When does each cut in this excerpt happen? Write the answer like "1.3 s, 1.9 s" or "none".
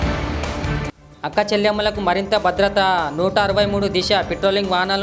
1.0 s